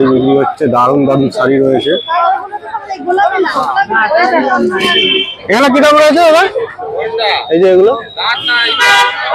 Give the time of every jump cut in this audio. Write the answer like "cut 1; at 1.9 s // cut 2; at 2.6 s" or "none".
cut 1; at 5.3 s